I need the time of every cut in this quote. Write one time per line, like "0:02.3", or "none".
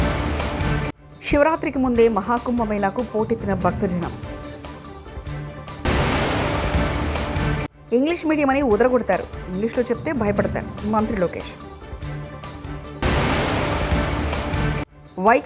0:00.9